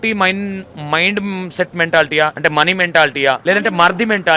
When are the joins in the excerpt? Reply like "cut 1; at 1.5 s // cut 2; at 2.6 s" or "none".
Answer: cut 1; at 2.3 s // cut 2; at 3.4 s